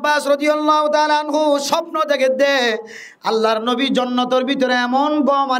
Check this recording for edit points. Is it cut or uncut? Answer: uncut